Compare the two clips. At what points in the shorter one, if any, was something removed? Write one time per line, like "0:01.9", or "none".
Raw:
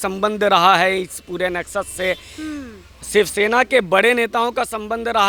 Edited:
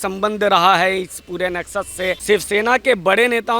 0:02.2